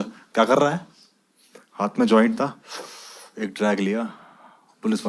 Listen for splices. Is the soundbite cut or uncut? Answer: uncut